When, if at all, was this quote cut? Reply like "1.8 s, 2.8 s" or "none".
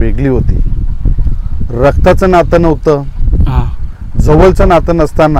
none